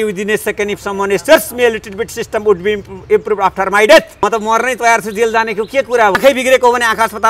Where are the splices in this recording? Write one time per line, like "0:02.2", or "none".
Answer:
0:04.2
0:06.1